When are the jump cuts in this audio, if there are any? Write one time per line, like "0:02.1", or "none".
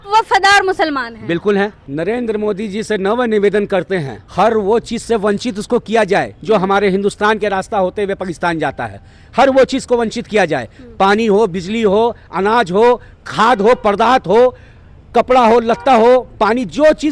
0:01.8
0:04.2